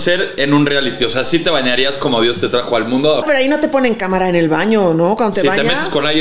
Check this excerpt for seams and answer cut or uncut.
cut